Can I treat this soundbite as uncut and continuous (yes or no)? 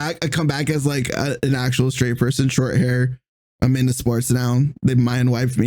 yes